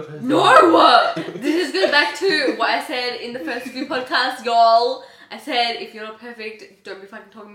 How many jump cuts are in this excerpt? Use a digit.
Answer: 1